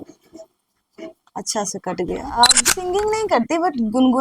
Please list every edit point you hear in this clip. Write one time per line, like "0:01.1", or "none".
0:02.3